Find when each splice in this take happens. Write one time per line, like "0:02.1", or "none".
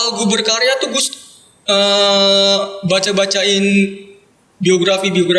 none